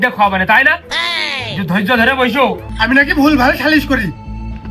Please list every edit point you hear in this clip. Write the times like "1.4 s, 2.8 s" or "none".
2.7 s